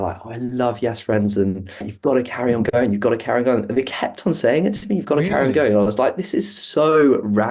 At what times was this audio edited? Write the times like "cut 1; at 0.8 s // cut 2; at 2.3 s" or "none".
cut 1; at 1.9 s